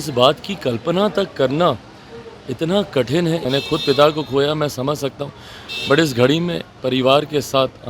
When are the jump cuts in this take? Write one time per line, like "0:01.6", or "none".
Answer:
0:03.4